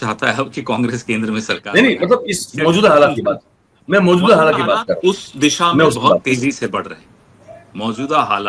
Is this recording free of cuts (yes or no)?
yes